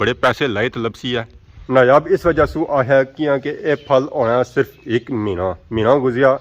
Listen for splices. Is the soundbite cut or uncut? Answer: uncut